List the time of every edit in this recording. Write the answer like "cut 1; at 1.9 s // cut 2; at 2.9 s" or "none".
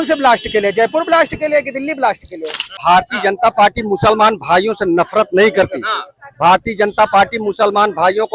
cut 1; at 2.7 s